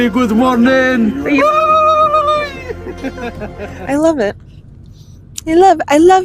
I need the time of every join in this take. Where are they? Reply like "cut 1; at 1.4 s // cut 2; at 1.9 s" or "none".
cut 1; at 3.7 s